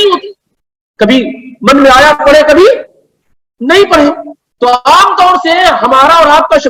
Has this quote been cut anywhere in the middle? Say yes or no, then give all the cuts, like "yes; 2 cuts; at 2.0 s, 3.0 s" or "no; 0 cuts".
no; 0 cuts